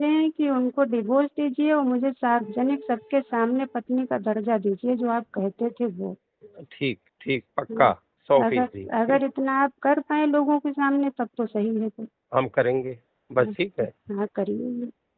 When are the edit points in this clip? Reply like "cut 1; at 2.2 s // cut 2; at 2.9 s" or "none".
none